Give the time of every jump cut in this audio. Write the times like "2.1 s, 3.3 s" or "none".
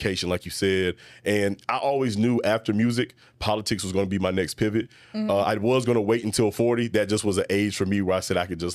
none